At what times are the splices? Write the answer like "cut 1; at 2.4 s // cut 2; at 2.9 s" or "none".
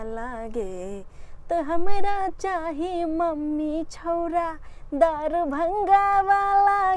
none